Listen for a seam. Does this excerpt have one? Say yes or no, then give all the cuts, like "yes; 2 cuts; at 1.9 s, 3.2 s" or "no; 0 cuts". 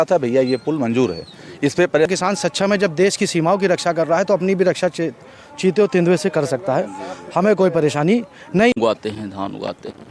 yes; 2 cuts; at 2.1 s, 8.8 s